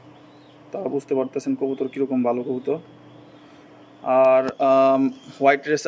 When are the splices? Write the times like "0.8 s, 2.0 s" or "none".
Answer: none